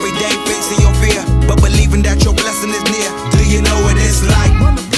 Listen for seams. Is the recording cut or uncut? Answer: uncut